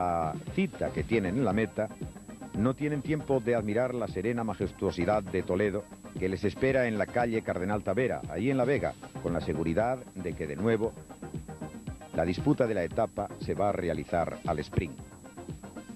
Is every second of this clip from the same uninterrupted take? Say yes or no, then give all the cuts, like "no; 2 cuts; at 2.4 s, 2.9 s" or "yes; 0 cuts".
yes; 0 cuts